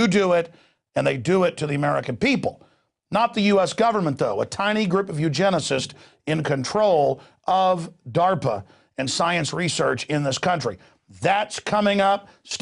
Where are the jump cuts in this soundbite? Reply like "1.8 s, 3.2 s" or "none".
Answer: 6.9 s